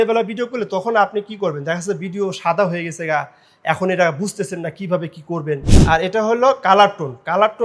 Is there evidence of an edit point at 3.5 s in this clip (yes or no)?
no